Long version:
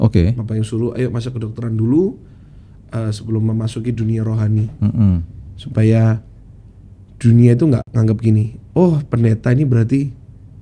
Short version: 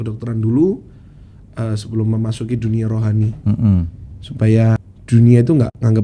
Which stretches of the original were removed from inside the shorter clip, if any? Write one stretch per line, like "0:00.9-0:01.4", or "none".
0:06.3-0:07.0